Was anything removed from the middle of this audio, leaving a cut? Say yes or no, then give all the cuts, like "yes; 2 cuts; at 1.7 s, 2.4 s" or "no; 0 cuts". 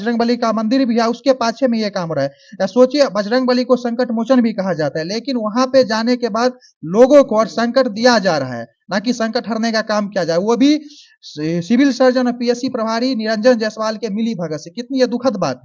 no; 0 cuts